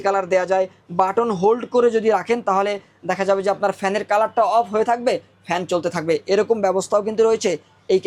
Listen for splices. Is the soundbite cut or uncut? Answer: uncut